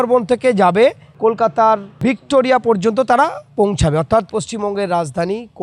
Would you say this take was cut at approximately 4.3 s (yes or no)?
no